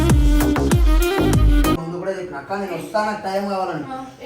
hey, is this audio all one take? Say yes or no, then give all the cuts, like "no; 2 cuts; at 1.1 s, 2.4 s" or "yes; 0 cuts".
no; 1 cut; at 1.8 s